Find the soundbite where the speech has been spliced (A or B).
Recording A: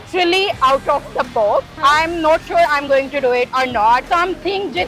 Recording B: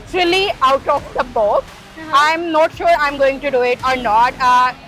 A